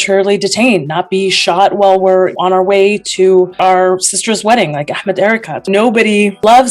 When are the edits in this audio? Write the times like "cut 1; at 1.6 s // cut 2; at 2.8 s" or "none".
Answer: cut 1; at 2.3 s // cut 2; at 3.6 s // cut 3; at 5.6 s